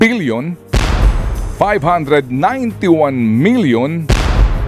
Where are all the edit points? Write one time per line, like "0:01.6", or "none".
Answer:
none